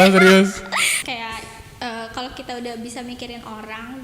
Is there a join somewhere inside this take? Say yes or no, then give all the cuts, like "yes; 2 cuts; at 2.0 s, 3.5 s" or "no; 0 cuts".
yes; 1 cut; at 1.0 s